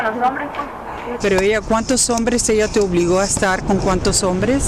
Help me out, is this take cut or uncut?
cut